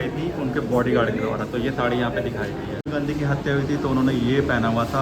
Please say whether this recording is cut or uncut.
cut